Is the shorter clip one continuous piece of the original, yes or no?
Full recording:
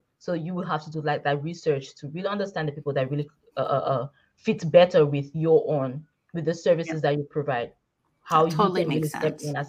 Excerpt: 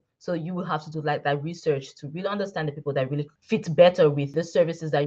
no